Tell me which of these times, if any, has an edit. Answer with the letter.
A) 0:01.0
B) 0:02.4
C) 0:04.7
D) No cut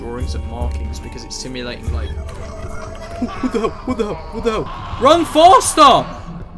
C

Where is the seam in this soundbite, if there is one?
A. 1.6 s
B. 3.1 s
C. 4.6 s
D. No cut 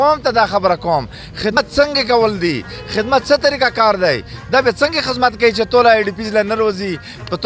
A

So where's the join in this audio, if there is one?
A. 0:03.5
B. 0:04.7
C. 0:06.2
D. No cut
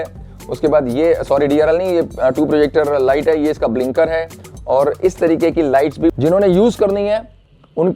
C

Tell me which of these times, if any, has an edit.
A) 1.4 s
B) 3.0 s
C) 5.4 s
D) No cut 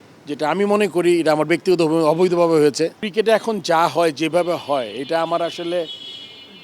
B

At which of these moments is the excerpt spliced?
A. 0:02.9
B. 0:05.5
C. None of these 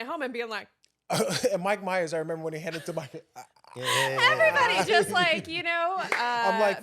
C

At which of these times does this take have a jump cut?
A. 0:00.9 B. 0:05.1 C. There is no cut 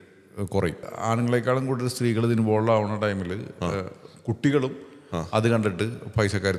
A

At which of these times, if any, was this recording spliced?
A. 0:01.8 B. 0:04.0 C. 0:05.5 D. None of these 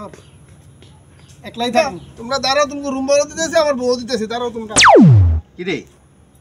A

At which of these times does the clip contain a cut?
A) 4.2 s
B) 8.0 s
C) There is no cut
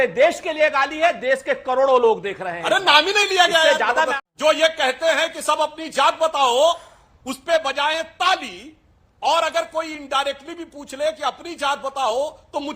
A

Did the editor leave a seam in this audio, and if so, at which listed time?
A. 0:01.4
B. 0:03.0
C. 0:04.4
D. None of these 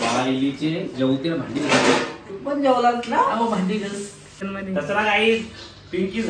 C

